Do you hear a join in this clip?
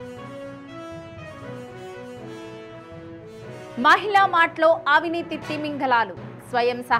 yes; 1 cut; at 1.1 s

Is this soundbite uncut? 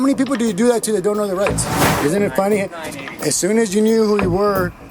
no; 1 cut; at 1.6 s

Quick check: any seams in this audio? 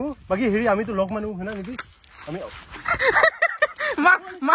no; 0 cuts

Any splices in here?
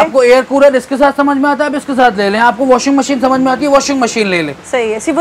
no; 0 cuts

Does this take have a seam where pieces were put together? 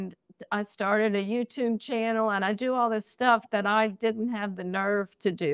no; 0 cuts

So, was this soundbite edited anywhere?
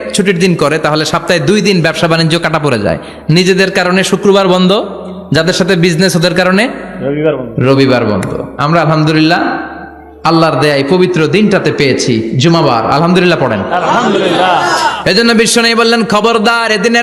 no; 0 cuts

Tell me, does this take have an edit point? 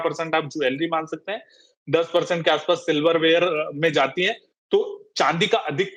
no; 0 cuts

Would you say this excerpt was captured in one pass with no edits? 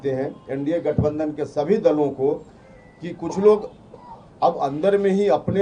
yes; 0 cuts

